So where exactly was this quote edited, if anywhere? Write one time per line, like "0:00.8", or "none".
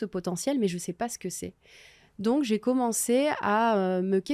none